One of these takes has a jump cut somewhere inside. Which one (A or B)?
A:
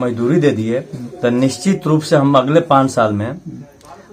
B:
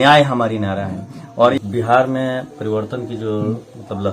B